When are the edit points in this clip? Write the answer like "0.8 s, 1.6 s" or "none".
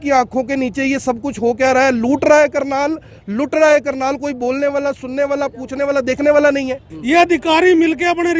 6.9 s